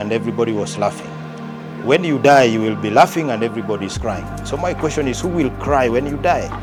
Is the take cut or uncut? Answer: uncut